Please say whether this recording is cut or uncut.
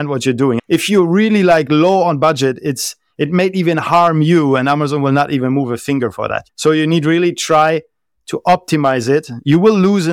cut